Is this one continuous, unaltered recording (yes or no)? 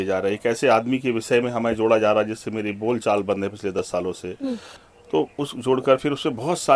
no